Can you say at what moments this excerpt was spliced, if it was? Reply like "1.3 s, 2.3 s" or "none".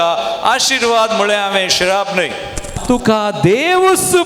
2.7 s